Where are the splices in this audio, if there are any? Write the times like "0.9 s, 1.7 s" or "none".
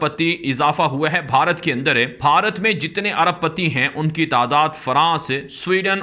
2.1 s